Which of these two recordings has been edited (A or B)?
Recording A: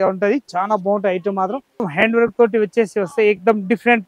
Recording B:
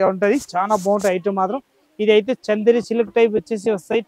A